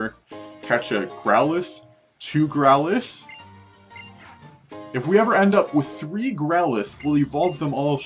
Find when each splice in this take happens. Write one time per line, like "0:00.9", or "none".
none